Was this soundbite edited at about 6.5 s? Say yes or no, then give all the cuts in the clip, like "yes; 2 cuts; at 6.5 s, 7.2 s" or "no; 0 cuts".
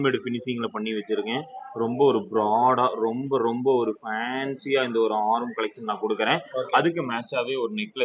no; 0 cuts